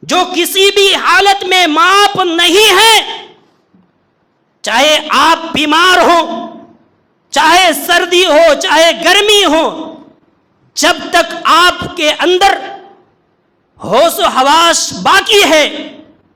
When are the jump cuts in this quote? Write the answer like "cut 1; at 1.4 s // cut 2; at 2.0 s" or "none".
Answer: none